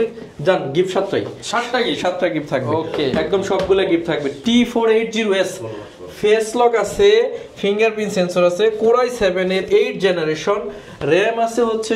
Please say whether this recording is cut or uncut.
uncut